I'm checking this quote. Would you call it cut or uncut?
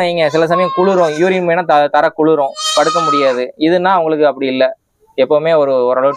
uncut